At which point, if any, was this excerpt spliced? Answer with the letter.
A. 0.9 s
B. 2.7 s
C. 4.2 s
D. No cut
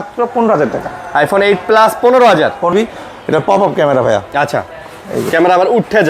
B